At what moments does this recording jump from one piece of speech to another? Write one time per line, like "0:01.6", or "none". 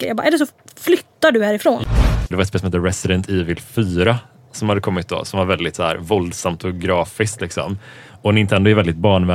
0:01.9

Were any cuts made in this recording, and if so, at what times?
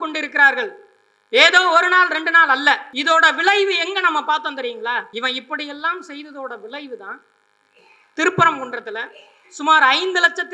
0:02.9
0:05.1

